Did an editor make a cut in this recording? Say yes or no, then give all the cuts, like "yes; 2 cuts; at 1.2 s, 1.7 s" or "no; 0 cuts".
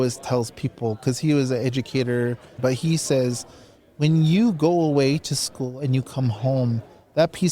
yes; 1 cut; at 2.5 s